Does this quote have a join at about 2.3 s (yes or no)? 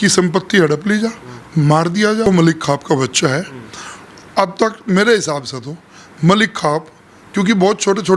yes